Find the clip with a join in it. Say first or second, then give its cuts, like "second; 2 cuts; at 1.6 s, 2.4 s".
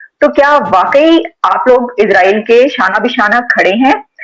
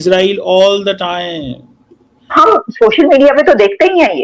second; 1 cut; at 2.3 s